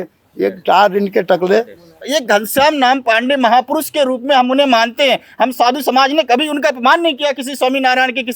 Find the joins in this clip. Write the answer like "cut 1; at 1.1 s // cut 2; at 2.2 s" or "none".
none